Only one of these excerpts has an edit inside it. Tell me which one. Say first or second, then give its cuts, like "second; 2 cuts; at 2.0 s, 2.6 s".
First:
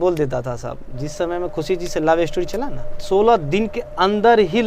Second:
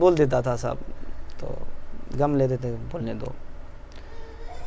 first; 2 cuts; at 0.9 s, 3.0 s